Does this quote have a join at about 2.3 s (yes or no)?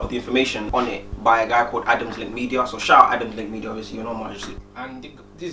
no